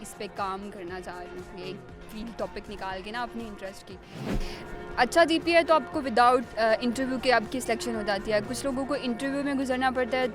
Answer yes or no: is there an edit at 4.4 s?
yes